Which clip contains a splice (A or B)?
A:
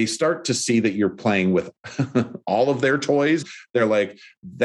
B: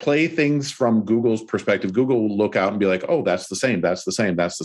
A